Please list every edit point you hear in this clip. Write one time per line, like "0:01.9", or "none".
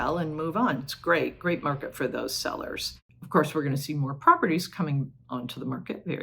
0:03.2